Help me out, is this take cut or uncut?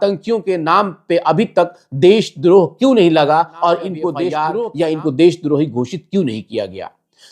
cut